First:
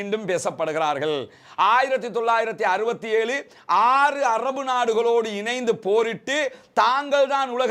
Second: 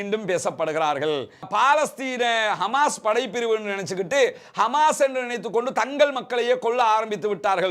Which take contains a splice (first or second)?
second